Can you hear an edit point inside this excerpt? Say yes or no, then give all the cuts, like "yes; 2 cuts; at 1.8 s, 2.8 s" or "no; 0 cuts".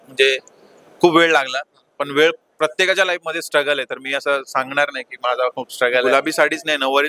yes; 1 cut; at 6.1 s